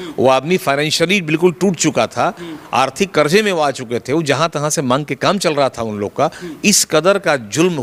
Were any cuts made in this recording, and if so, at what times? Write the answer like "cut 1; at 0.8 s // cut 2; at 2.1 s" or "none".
none